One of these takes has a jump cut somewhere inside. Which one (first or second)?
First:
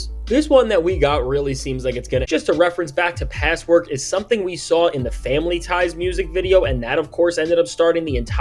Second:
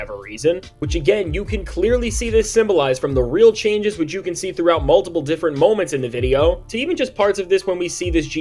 first